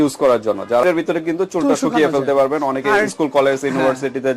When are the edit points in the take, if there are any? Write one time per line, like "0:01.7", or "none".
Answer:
0:00.9